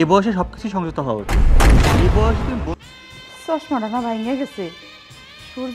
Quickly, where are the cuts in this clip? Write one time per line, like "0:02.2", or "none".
0:02.8